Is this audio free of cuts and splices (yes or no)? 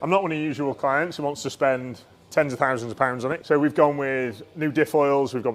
no